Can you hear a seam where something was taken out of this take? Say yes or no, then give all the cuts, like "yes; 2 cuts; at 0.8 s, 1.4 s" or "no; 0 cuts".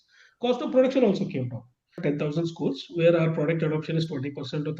yes; 1 cut; at 2.0 s